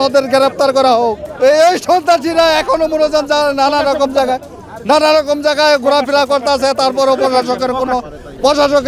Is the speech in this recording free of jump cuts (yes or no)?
yes